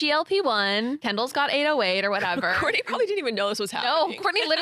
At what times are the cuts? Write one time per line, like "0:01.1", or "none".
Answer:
0:01.0